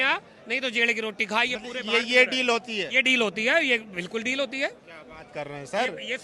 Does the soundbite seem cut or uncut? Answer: uncut